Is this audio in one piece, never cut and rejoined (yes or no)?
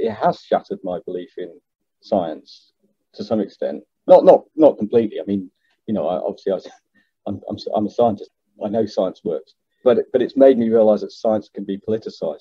no